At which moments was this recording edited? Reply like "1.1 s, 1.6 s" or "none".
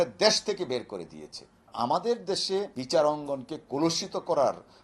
1.7 s, 2.8 s